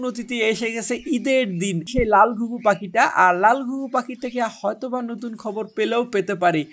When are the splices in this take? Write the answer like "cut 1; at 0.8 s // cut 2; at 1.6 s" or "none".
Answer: cut 1; at 1.9 s